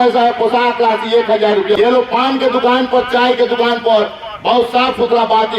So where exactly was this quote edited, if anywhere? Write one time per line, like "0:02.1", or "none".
0:01.8